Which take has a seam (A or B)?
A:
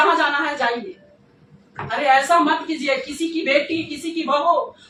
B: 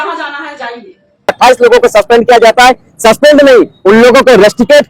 B